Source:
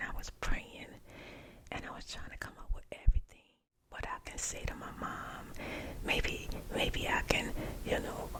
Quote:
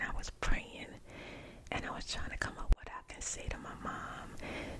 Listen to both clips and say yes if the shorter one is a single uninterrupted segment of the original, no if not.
no